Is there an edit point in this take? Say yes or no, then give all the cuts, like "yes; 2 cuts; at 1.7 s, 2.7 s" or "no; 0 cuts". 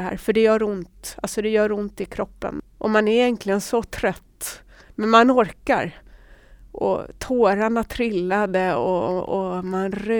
yes; 1 cut; at 2.6 s